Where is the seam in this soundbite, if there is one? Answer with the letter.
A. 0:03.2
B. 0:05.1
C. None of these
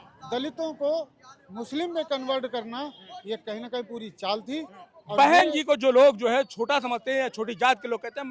B